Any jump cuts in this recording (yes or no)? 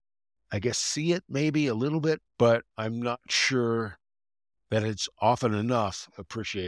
yes